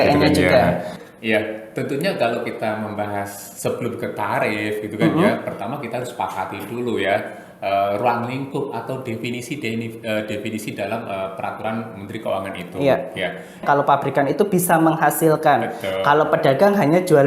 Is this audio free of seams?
no; 2 cuts; at 1.0 s, 13.6 s

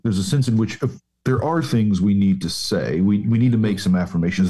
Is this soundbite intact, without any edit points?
yes; 0 cuts

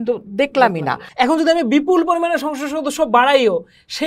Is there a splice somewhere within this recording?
yes; 1 cut; at 1.0 s

